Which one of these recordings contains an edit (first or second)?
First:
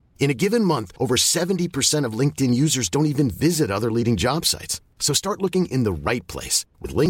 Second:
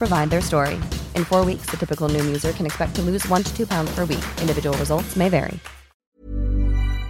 second